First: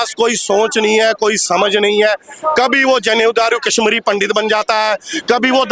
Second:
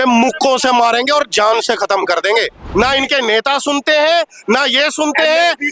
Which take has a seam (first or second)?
second